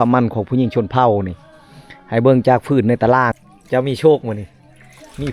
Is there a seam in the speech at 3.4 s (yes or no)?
yes